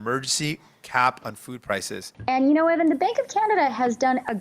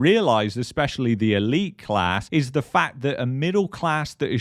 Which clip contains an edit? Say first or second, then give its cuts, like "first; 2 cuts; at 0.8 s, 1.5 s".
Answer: first; 1 cut; at 2.1 s